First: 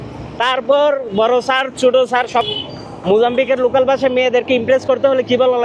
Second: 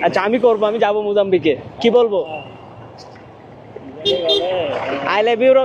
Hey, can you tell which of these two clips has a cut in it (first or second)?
first